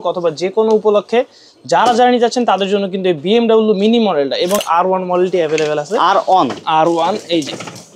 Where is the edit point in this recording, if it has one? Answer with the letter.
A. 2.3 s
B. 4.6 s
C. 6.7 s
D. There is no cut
B